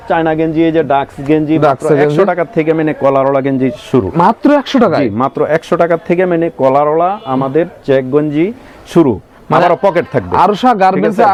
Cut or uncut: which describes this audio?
uncut